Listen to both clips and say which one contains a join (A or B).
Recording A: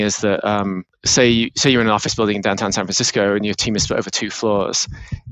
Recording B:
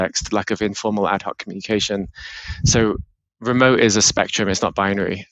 A